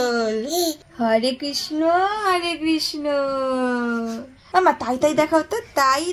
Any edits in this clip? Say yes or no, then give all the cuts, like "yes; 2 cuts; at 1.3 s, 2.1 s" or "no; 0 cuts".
yes; 2 cuts; at 0.9 s, 4.4 s